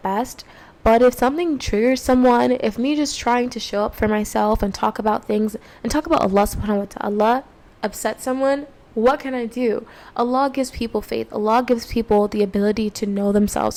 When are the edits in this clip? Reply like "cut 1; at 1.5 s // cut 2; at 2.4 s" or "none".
none

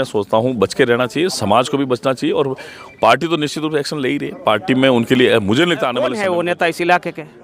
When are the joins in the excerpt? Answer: cut 1; at 6.0 s

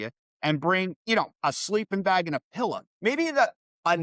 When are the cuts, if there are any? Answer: none

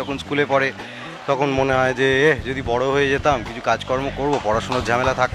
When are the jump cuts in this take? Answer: none

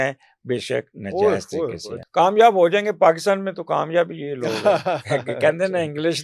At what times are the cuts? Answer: cut 1; at 2.0 s

